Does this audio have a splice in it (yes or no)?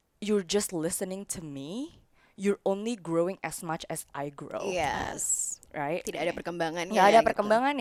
no